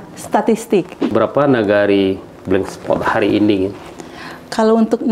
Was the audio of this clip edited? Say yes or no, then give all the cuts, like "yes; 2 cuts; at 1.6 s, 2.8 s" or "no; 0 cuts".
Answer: yes; 1 cut; at 1.0 s